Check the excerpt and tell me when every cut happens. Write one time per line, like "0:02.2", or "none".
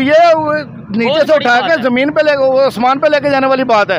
none

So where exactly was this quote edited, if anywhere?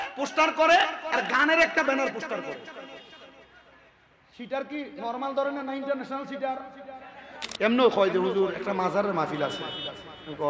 0:07.4

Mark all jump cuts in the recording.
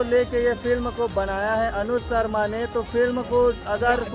none

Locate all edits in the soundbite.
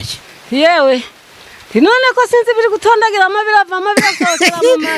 none

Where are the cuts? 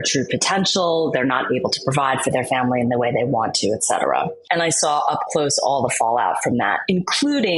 0:04.4

